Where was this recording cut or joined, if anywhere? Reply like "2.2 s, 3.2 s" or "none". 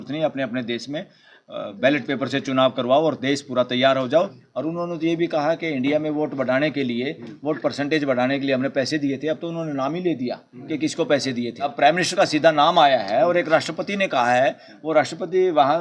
4.4 s, 11.6 s